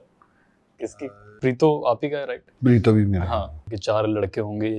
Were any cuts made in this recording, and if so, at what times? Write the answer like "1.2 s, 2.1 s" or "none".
1.2 s, 3.7 s

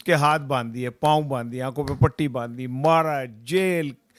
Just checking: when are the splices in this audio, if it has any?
none

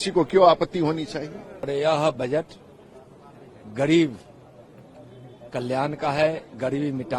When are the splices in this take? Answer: 1.7 s

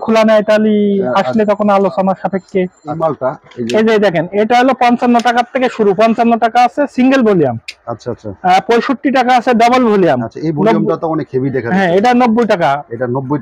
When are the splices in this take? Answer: 2.9 s

